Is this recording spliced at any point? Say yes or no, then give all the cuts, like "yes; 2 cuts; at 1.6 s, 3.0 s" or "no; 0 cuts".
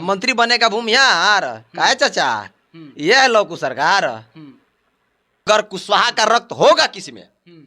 yes; 1 cut; at 5.5 s